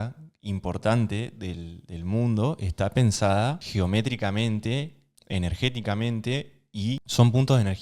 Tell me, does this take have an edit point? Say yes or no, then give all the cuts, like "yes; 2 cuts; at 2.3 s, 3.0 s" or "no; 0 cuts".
no; 0 cuts